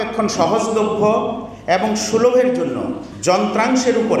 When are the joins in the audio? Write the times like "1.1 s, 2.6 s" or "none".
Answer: none